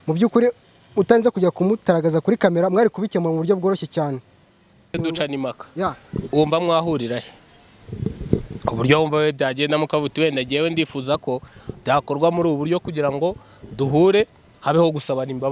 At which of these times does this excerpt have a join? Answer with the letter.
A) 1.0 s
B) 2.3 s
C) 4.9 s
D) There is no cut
C